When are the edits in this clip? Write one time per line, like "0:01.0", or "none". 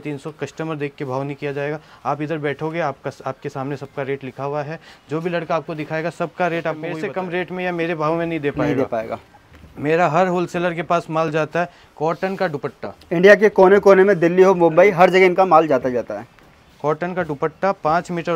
0:06.9